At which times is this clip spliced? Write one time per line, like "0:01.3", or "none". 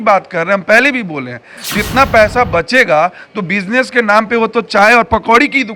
none